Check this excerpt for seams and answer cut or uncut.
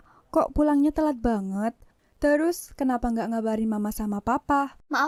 uncut